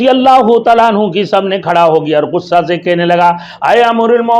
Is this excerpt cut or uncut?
uncut